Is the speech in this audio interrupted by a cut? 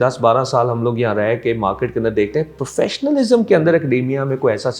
no; 0 cuts

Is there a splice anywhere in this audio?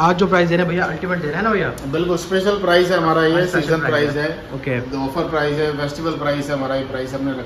no; 0 cuts

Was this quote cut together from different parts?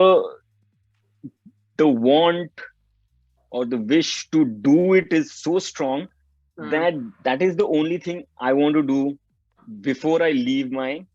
no; 0 cuts

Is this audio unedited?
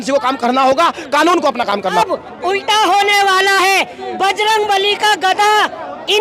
no; 1 cut; at 2.0 s

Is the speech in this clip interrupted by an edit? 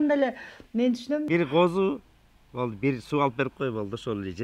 yes; 1 cut; at 1.3 s

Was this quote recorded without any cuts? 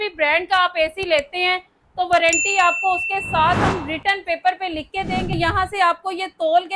no; 1 cut; at 5.3 s

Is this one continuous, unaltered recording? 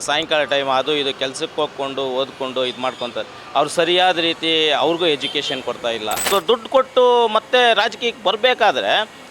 no; 1 cut; at 6.3 s

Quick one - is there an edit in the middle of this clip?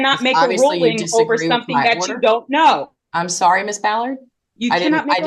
no; 0 cuts

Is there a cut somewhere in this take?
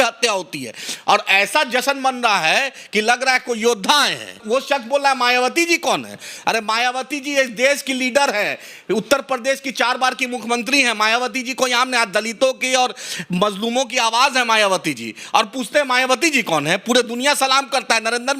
yes; 1 cut; at 4.4 s

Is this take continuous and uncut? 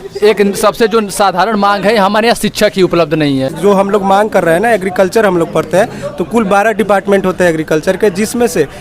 no; 1 cut; at 3.5 s

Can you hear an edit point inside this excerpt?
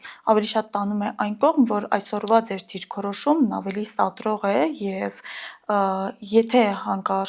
no; 0 cuts

